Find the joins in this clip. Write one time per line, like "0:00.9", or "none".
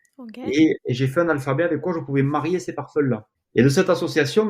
0:03.3

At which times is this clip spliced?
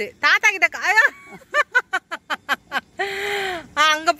none

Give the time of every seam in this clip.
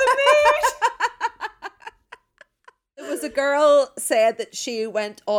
0:03.2

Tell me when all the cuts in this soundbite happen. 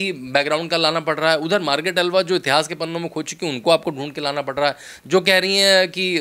none

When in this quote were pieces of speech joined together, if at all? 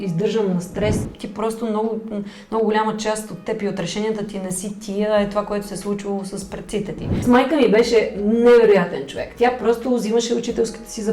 0:01.2
0:07.1

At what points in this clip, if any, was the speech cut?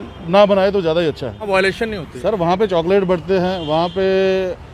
0:01.5

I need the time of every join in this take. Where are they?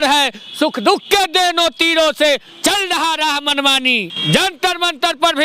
0:04.1

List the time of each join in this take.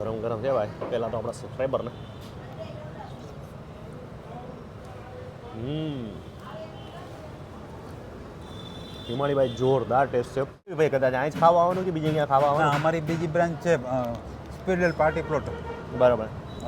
0:10.8

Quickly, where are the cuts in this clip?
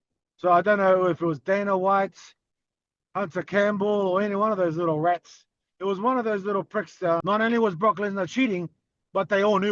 0:07.2

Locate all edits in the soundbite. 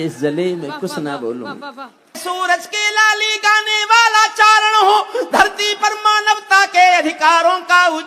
0:02.2

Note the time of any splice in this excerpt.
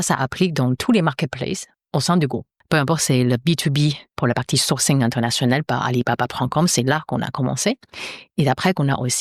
0:01.7
0:02.5
0:04.1

